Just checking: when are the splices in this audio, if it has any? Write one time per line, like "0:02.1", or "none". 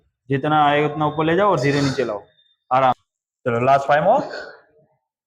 0:02.9